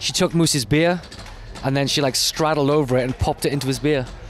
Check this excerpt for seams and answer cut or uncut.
uncut